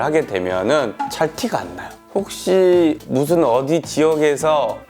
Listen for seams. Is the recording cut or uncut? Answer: cut